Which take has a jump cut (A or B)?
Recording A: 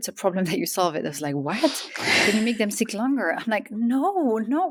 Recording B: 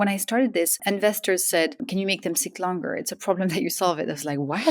B